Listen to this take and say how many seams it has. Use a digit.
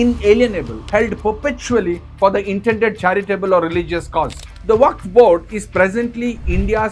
1